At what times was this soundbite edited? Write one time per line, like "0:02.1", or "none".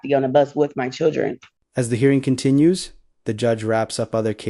none